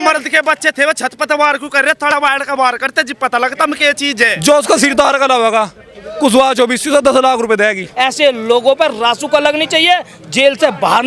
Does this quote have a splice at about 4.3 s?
yes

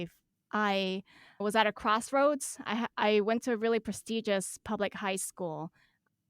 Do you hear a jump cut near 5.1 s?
no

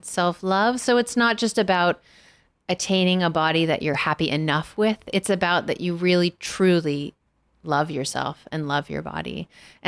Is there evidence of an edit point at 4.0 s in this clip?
yes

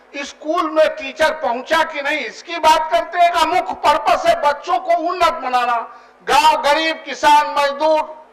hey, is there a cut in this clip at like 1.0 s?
no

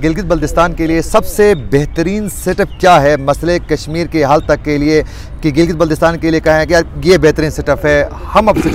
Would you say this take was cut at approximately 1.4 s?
no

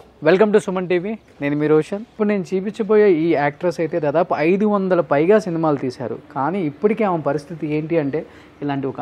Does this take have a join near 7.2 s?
no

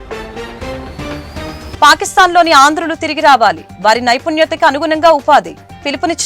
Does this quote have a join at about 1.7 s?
yes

